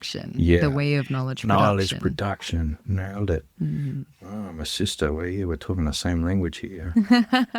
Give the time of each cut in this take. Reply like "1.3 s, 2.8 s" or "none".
none